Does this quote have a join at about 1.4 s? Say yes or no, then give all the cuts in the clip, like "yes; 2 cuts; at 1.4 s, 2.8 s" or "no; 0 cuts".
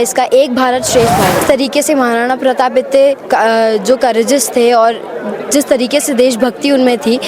yes; 1 cut; at 1.4 s